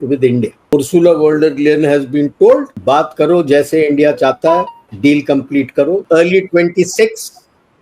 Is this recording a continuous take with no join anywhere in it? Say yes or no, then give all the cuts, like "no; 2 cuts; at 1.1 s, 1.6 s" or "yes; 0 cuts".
no; 4 cuts; at 0.7 s, 2.7 s, 4.8 s, 6.0 s